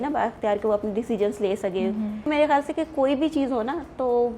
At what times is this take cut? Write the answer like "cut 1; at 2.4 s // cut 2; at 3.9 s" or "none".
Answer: cut 1; at 2.3 s